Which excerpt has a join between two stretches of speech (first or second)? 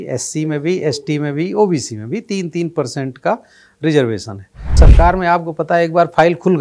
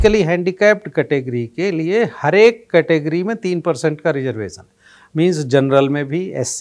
first